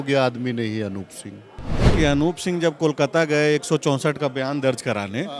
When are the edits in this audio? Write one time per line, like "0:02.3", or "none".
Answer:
0:01.9